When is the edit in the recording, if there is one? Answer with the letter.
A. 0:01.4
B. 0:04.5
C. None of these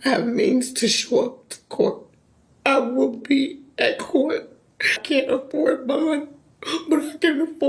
C